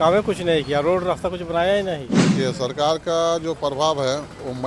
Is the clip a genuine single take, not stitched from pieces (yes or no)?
no